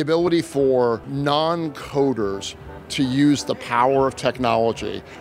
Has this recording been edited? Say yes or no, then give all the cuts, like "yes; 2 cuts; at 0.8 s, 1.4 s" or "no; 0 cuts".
yes; 1 cut; at 1.1 s